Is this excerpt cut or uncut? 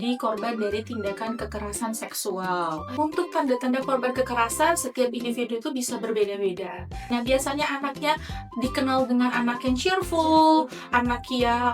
cut